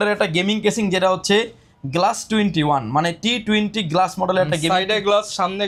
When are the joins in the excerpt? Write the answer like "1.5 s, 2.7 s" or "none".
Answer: none

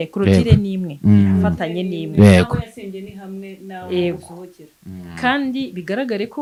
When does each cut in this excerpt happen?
none

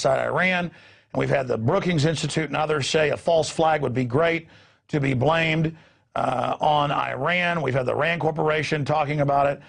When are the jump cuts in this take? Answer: 1.8 s

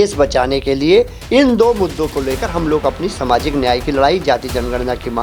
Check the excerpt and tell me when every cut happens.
1.2 s

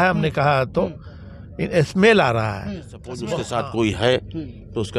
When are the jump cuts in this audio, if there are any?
3.2 s

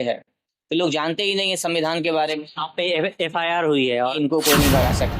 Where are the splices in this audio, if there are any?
2.5 s, 4.1 s

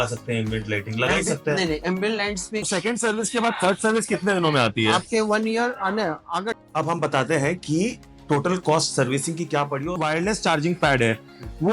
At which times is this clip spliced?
2.7 s, 6.5 s, 10.0 s

